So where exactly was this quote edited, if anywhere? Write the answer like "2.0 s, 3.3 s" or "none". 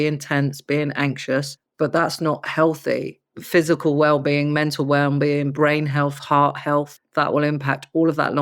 1.6 s